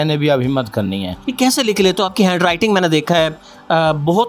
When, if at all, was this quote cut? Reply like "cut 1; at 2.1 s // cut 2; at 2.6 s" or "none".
cut 1; at 1.2 s